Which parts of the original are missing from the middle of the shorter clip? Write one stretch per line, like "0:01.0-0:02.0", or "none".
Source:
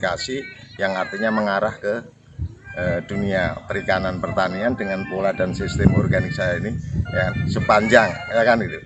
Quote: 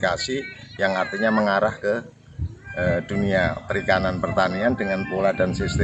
none

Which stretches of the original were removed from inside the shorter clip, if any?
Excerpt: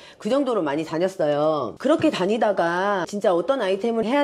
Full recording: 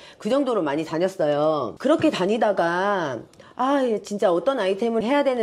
0:03.1-0:04.1

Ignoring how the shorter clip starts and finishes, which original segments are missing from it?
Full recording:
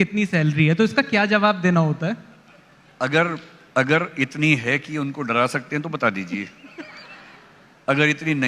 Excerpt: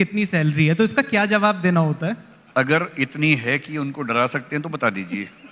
0:02.3-0:03.5

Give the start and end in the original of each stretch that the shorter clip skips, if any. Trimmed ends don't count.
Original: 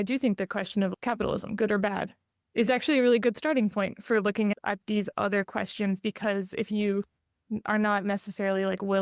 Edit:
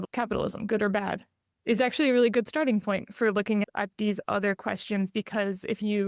none

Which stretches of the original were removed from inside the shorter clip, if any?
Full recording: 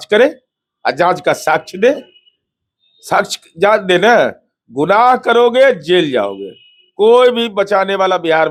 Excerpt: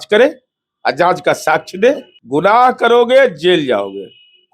0:02.1-0:04.6

